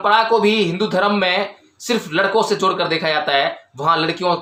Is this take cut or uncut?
uncut